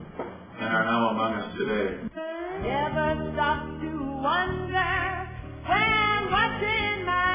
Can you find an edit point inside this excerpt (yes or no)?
yes